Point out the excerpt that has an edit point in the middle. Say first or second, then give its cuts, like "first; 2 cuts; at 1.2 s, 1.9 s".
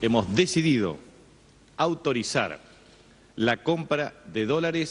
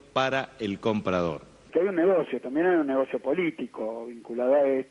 second; 1 cut; at 1.6 s